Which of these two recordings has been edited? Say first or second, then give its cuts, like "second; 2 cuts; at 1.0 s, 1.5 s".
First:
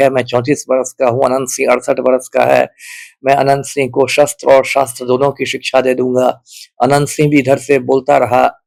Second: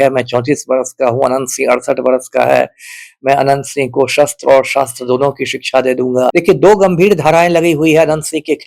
second; 1 cut; at 6.3 s